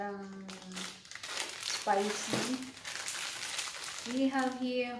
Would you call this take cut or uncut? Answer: uncut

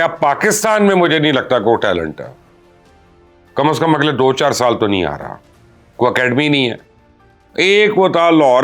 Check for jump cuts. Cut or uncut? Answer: uncut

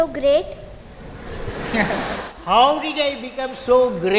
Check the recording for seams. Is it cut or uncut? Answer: uncut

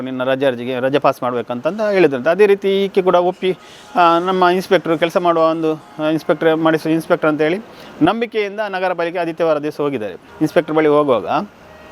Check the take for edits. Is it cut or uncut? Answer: cut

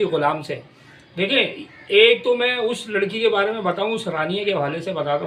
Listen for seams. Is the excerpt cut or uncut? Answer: uncut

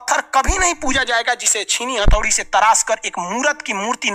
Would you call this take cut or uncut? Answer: uncut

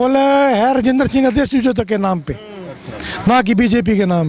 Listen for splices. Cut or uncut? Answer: uncut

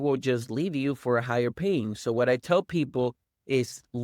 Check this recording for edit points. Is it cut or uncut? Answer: uncut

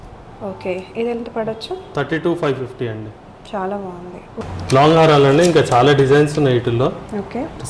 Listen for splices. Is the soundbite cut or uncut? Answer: cut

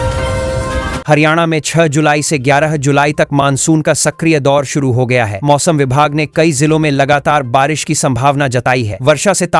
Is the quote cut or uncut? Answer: cut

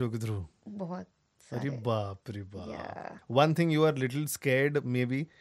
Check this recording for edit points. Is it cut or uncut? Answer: cut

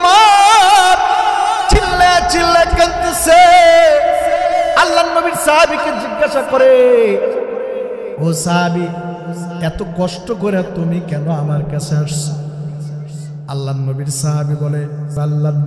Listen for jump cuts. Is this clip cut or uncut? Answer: uncut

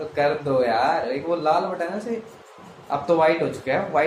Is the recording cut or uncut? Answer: uncut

